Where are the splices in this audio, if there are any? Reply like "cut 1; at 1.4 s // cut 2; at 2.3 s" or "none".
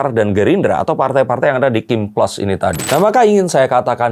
cut 1; at 2.8 s